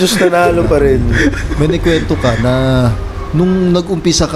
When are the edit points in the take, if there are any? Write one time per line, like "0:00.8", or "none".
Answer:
0:01.4